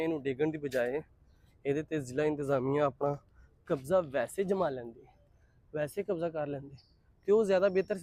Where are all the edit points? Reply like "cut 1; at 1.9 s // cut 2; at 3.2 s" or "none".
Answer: none